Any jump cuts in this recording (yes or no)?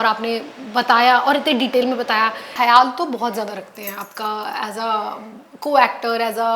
yes